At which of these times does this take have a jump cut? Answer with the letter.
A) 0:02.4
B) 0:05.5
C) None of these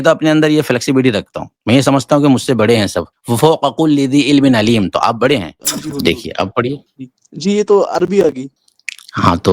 B